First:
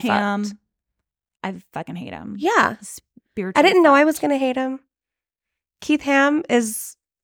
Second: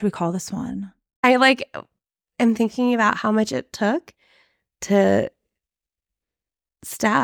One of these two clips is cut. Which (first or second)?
second